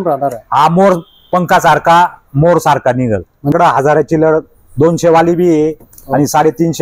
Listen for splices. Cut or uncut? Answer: cut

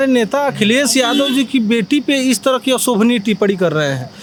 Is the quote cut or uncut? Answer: uncut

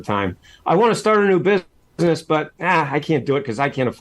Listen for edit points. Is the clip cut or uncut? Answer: cut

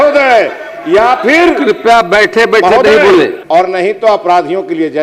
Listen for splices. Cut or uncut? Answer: cut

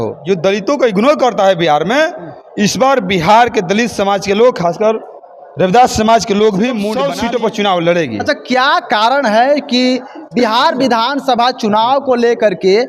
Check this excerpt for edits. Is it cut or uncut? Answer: cut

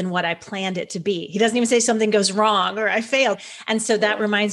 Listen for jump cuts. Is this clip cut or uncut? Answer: cut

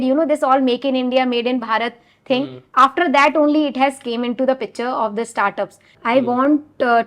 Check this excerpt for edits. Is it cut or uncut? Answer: cut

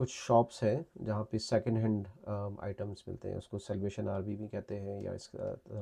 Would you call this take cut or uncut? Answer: uncut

